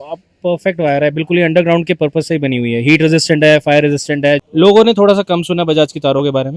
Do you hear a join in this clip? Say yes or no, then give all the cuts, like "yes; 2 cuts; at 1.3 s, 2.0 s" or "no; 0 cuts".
yes; 1 cut; at 4.4 s